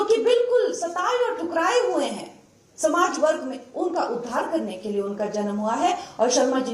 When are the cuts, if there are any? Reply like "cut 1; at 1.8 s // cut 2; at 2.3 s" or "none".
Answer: none

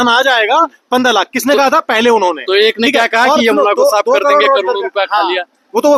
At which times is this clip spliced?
none

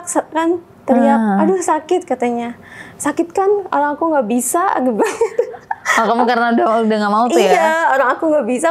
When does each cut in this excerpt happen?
none

